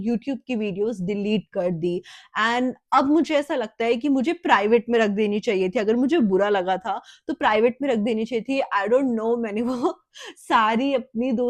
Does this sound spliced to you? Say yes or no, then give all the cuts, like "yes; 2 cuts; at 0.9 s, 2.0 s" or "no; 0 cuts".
no; 0 cuts